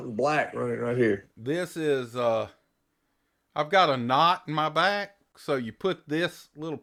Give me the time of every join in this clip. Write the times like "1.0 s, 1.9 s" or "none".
none